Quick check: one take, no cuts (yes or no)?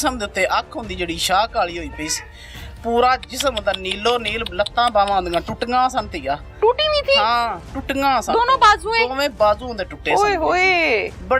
yes